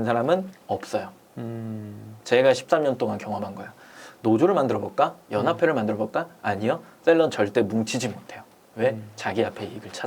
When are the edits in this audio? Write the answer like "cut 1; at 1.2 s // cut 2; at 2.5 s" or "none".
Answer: none